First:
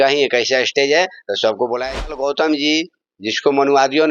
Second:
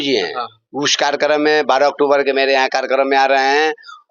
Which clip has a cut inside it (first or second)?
first